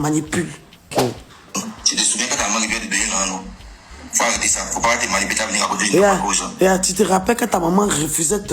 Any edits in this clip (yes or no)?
yes